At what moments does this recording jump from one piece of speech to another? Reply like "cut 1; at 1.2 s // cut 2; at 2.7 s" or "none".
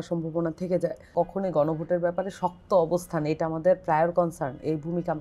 cut 1; at 1.1 s